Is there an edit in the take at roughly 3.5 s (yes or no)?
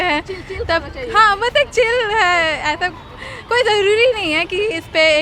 no